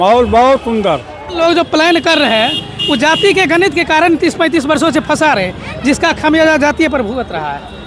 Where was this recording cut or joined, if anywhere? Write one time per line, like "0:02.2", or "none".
0:01.4